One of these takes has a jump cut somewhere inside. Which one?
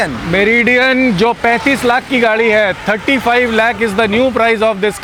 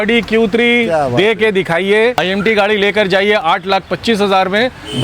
second; 1 cut; at 2.2 s

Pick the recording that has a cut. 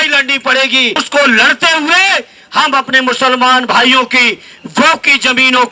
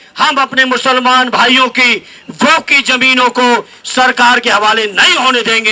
first; 1 cut; at 1.0 s

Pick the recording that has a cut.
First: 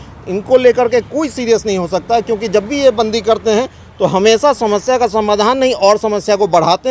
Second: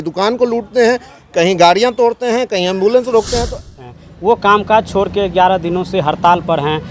second; 1 cut; at 3.7 s

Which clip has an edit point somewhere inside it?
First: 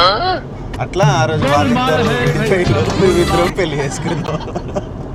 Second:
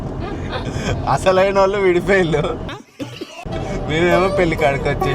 second; 1 cut; at 3.4 s

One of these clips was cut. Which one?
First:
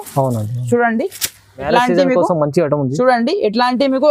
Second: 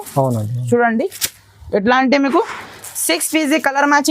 first; 1 cut; at 1.7 s

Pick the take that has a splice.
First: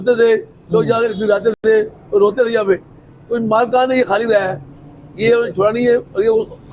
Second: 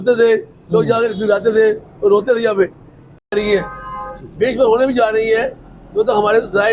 second; 2 cuts; at 1.5 s, 3.3 s

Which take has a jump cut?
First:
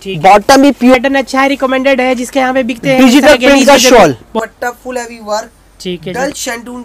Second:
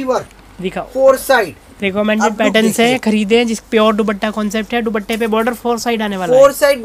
first; 2 cuts; at 0.9 s, 4.4 s

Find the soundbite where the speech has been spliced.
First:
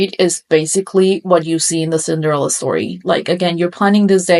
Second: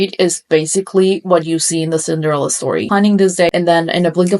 second; 1 cut; at 2.9 s

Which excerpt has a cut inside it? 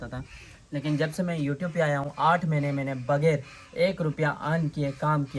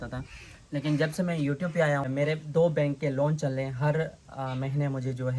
second; 1 cut; at 2.1 s

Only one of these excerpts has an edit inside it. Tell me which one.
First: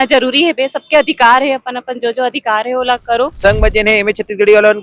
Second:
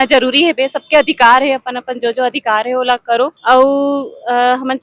first; 1 cut; at 3.3 s

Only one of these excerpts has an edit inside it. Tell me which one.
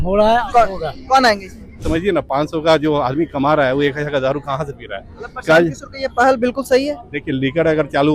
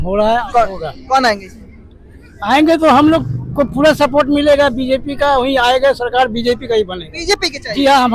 first; 1 cut; at 1.8 s

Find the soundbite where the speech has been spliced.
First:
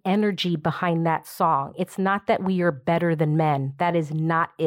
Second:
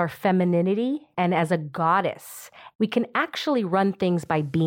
second; 2 cuts; at 1.1 s, 2.6 s

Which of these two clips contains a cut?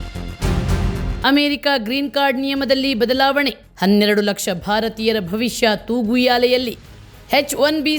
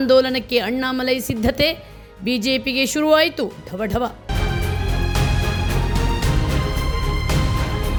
first; 1 cut; at 1.2 s

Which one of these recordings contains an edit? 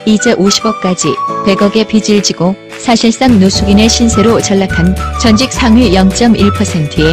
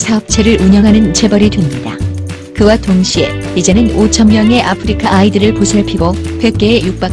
second; 1 cut; at 5.9 s

